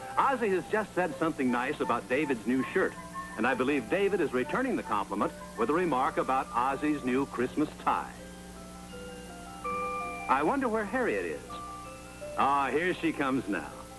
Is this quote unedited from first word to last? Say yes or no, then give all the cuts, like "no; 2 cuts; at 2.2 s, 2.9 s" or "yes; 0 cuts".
yes; 0 cuts